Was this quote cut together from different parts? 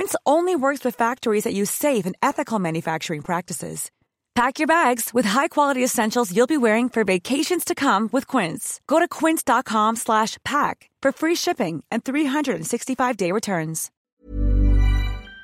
yes; 1 cut; at 13.9 s

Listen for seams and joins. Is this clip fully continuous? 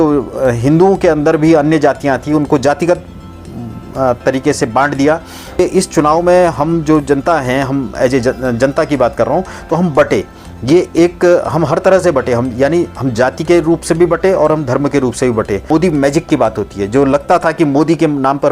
no; 2 cuts; at 5.6 s, 15.7 s

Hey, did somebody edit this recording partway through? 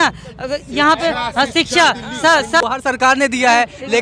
yes; 1 cut; at 2.6 s

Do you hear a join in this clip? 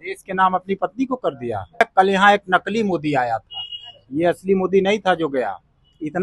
yes; 1 cut; at 1.8 s

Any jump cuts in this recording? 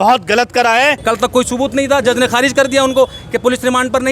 yes; 1 cut; at 0.9 s

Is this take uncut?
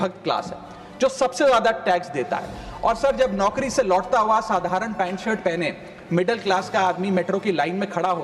yes; 0 cuts

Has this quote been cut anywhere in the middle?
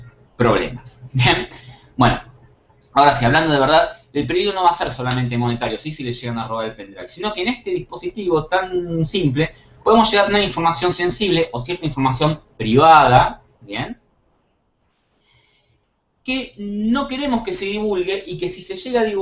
no; 0 cuts

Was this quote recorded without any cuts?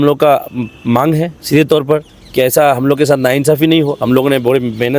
yes; 0 cuts

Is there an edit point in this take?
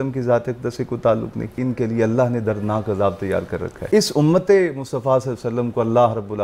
yes; 2 cuts; at 1.5 s, 3.8 s

